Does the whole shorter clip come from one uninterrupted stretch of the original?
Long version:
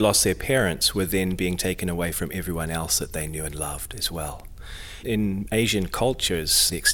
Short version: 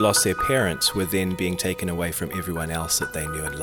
yes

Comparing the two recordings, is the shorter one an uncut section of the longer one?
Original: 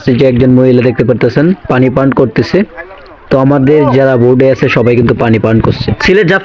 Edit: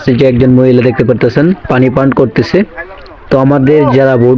yes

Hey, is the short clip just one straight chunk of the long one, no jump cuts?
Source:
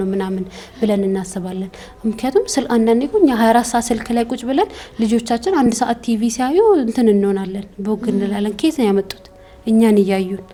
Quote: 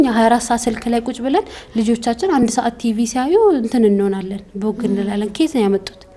yes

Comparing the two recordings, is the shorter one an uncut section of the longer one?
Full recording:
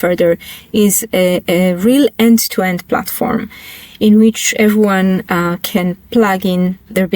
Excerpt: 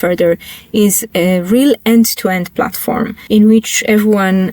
no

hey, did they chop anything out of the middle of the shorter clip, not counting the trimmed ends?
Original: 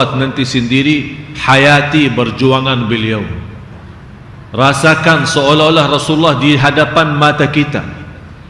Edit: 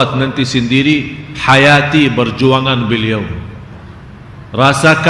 no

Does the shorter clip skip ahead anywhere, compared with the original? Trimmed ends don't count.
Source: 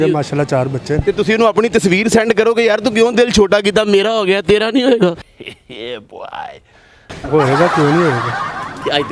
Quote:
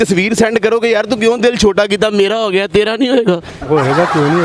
yes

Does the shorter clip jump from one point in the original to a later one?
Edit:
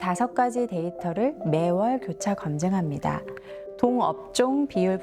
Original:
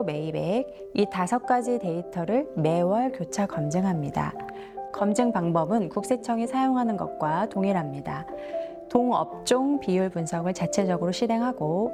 yes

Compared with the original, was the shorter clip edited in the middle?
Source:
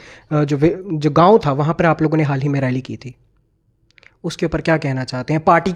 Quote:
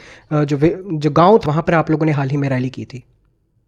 yes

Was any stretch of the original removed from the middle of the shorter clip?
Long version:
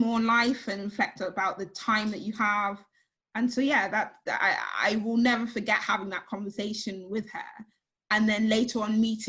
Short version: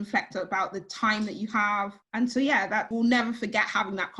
yes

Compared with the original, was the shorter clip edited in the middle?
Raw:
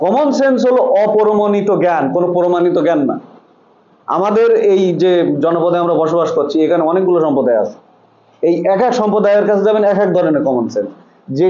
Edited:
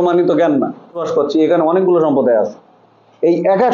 yes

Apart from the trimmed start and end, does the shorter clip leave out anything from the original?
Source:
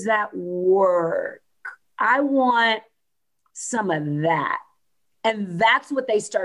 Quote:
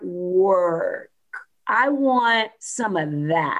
yes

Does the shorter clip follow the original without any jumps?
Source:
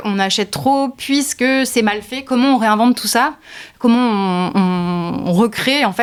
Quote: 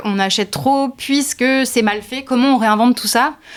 yes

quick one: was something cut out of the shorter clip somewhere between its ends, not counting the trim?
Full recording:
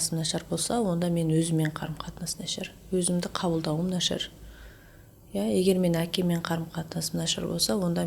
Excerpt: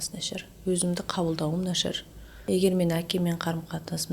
yes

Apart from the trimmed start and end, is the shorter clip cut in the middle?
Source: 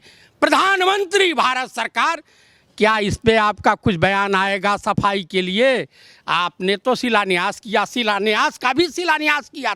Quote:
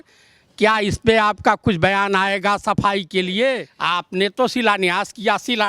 yes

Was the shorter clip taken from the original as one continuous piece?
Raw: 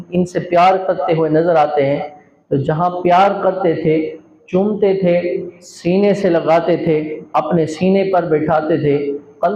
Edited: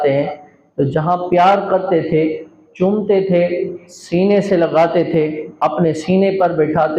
yes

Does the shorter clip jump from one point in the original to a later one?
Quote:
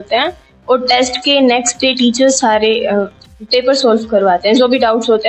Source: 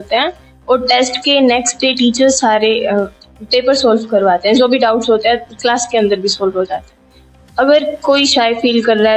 no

